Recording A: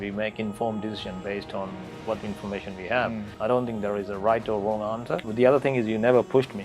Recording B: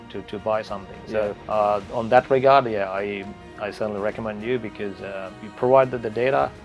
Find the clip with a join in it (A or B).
A